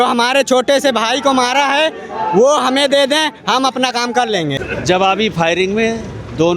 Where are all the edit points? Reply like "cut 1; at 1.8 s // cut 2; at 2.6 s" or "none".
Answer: cut 1; at 4.6 s